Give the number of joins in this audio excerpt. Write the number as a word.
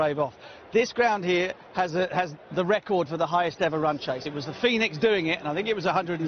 zero